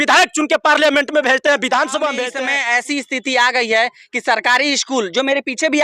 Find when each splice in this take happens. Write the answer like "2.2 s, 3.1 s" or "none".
2.3 s